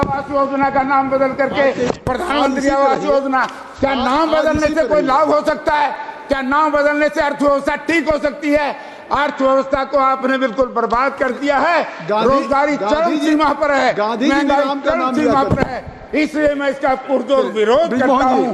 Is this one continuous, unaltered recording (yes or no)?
yes